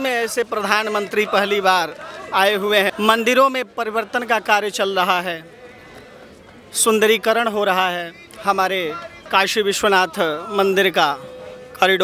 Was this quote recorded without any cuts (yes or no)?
no